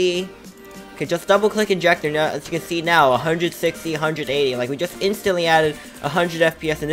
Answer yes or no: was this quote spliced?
no